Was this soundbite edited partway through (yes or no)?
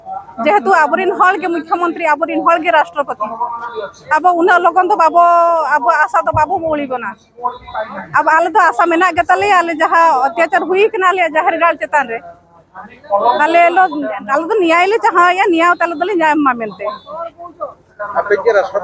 no